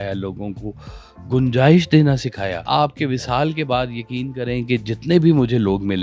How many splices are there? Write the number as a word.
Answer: one